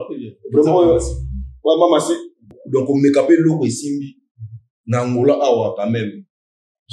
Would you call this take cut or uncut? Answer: cut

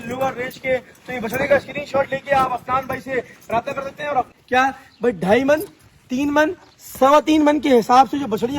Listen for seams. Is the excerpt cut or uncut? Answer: cut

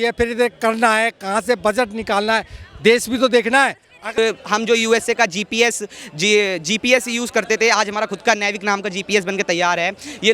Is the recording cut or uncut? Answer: cut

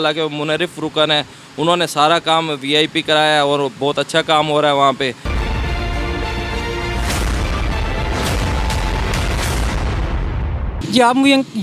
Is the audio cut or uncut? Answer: uncut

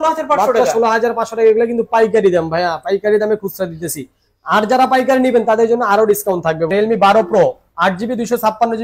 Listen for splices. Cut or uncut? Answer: cut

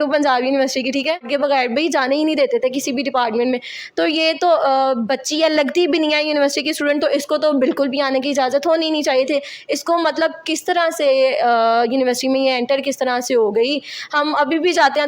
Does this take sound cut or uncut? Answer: cut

